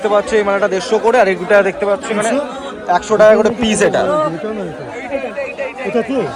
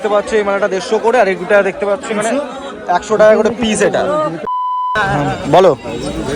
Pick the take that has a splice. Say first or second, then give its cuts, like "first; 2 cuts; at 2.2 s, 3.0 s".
second; 1 cut; at 5.0 s